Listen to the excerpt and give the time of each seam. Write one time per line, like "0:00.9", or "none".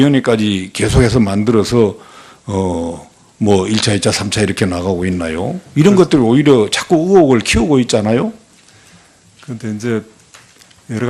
none

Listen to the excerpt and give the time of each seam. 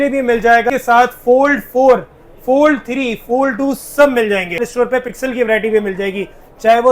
0:00.7
0:04.7

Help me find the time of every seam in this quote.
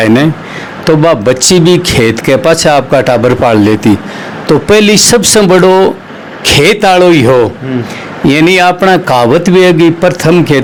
none

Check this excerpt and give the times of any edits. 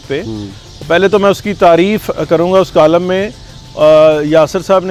none

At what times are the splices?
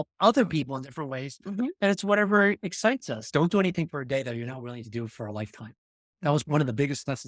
0:03.2
0:06.3

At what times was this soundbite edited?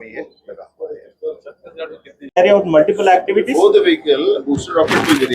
0:02.2

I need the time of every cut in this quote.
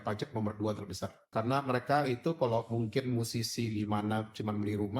0:01.1

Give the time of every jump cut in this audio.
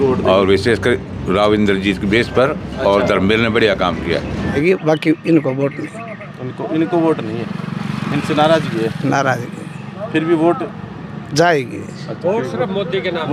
0:04.5

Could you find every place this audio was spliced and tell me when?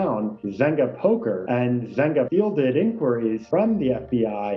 0:02.0

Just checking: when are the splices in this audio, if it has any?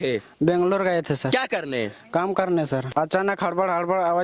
0:02.9

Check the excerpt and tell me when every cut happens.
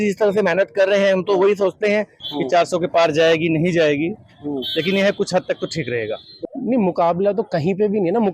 0:02.2
0:06.3

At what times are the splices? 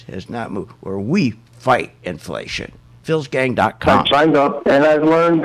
0:03.8

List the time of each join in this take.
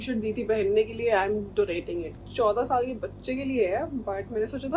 0:02.2

